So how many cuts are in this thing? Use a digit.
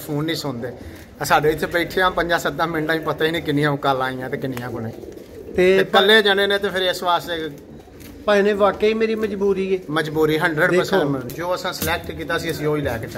1